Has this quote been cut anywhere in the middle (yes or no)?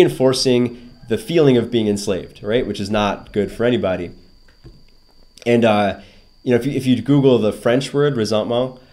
no